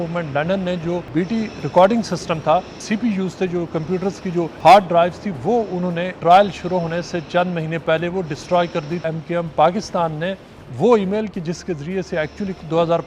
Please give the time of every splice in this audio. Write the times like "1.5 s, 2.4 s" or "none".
1.1 s, 2.8 s, 4.5 s, 6.1 s, 9.0 s